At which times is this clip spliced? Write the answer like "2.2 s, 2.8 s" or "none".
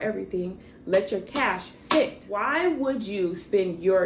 2.4 s